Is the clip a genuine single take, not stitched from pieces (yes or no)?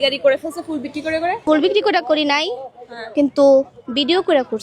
no